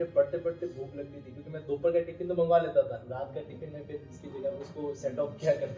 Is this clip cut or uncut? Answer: uncut